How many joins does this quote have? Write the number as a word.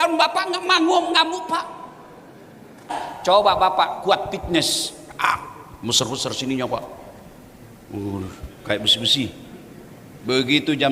one